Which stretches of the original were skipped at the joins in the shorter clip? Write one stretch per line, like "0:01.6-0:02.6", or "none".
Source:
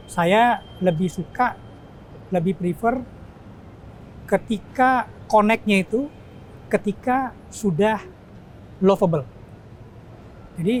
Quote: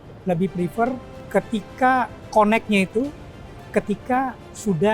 0:03.2-0:04.1